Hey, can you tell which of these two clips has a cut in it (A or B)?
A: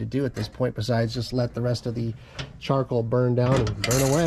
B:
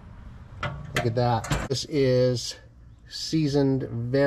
B